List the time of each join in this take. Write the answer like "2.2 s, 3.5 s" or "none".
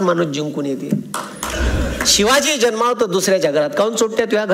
1.5 s

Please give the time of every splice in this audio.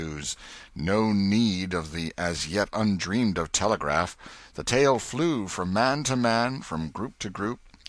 2.7 s

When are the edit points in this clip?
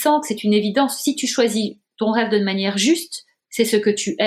none

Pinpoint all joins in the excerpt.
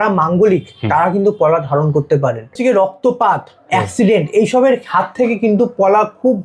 2.5 s

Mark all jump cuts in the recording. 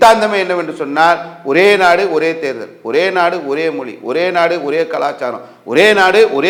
none

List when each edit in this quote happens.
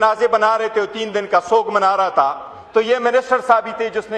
none

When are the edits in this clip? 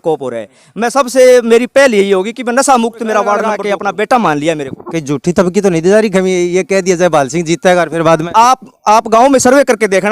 3.6 s

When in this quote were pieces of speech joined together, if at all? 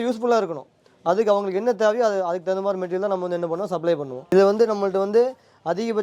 4.3 s

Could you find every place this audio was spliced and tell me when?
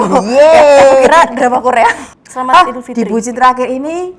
2.0 s

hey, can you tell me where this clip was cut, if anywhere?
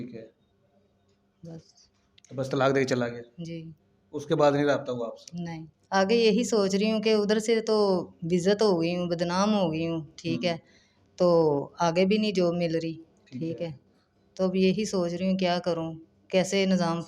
5.7 s

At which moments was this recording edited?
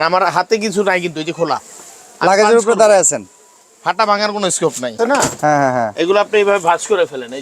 5.0 s

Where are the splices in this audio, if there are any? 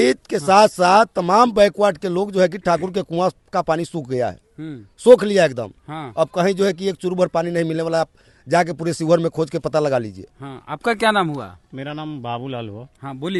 none

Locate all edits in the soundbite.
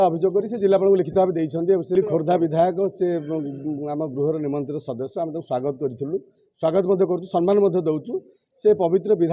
none

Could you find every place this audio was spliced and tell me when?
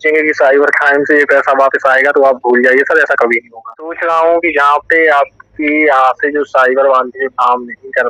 3.9 s

